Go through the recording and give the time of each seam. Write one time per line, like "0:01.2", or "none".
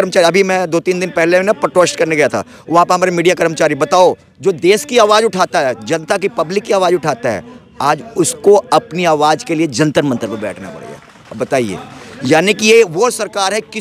none